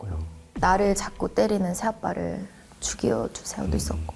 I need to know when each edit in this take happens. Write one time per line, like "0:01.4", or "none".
none